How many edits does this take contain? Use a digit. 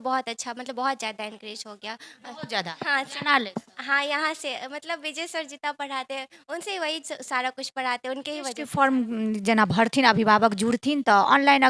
1